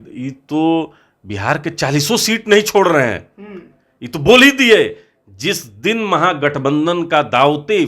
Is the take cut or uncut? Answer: uncut